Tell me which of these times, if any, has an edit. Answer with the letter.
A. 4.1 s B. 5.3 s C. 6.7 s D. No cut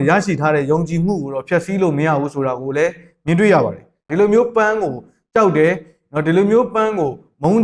A